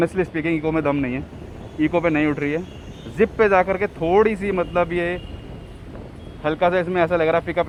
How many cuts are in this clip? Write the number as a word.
zero